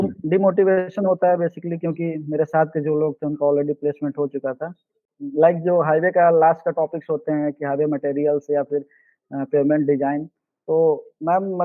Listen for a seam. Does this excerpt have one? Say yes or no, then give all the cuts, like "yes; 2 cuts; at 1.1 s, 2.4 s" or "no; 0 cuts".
yes; 1 cut; at 5.1 s